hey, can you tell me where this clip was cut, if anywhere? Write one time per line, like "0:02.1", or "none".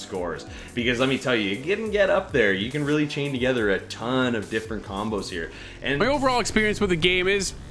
0:06.0